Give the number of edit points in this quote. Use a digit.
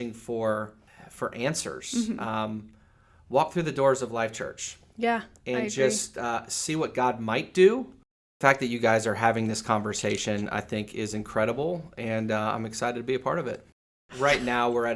2